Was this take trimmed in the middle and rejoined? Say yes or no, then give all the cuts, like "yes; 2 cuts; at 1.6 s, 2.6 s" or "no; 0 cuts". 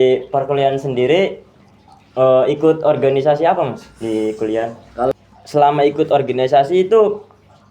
yes; 1 cut; at 5.1 s